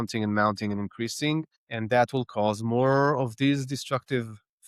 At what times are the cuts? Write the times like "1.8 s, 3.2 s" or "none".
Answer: none